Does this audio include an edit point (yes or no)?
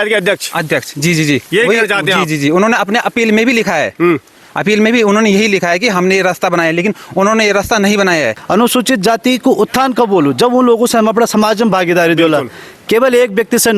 yes